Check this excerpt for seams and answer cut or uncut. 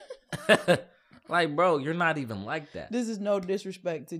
uncut